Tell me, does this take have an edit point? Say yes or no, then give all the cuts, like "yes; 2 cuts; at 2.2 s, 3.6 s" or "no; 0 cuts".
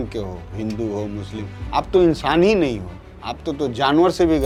no; 0 cuts